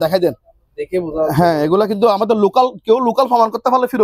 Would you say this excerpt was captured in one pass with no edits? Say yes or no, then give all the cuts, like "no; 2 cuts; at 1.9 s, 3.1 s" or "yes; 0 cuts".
yes; 0 cuts